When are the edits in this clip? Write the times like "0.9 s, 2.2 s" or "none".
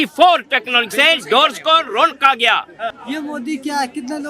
2.9 s